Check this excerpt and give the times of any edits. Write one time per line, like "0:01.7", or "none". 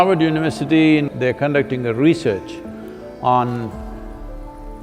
0:01.1